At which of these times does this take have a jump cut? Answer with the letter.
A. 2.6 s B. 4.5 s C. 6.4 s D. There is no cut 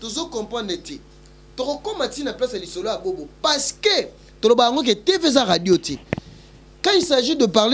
D